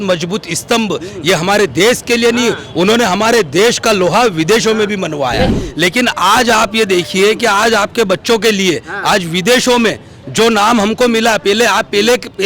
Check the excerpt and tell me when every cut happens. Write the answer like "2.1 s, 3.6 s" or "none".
5.6 s